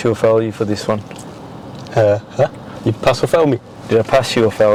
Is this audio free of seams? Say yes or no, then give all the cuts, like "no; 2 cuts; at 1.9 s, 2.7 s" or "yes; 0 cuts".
yes; 0 cuts